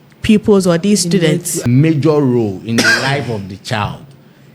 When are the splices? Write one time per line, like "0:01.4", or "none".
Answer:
0:01.7